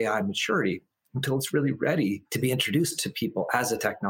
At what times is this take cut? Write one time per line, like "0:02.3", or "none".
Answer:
0:02.3